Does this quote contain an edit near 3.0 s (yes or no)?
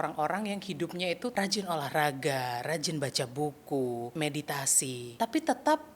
no